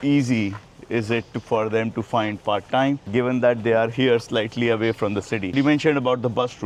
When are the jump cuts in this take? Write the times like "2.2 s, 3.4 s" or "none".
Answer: none